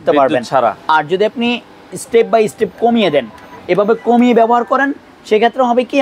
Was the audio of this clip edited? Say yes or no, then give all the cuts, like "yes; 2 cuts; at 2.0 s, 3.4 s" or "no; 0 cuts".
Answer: no; 0 cuts